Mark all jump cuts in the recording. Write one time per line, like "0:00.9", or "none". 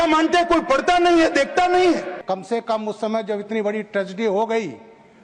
0:02.1